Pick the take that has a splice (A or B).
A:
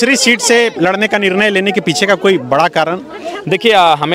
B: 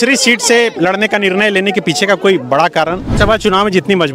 B